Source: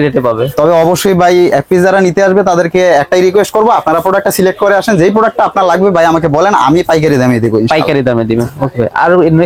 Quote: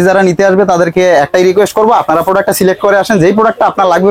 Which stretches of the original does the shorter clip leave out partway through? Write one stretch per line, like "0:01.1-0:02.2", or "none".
none